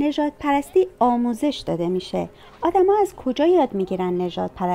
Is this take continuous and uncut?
yes; 0 cuts

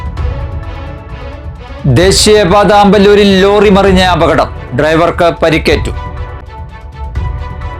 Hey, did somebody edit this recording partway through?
no; 0 cuts

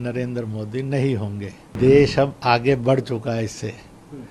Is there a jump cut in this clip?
yes; 1 cut; at 1.7 s

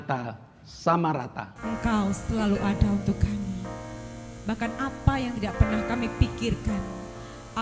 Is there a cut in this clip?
yes; 1 cut; at 1.5 s

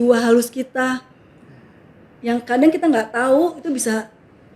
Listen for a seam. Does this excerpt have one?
no; 0 cuts

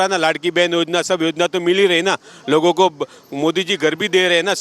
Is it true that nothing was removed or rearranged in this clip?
yes; 0 cuts

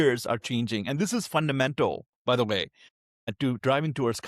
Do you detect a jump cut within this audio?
yes; 1 cut; at 3.4 s

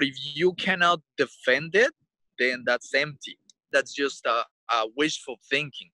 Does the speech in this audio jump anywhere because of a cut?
yes; 1 cut; at 3.7 s

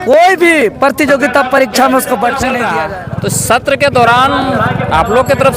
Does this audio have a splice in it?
yes; 1 cut; at 2.7 s

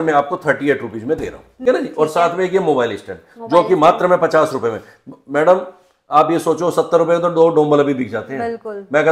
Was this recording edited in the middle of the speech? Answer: yes; 1 cut; at 1.6 s

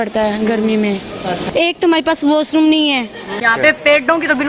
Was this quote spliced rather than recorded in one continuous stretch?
yes; 2 cuts; at 1.4 s, 3.4 s

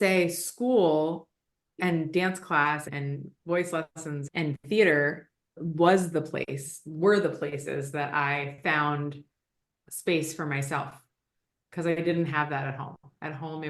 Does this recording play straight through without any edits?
no; 1 cut; at 1.8 s

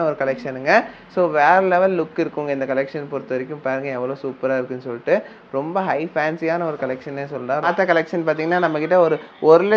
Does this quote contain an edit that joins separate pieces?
yes; 1 cut; at 7.7 s

